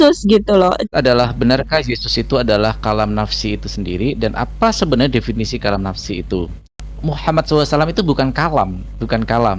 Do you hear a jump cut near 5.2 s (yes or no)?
no